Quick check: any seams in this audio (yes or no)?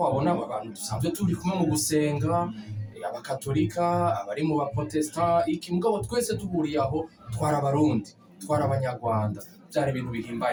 no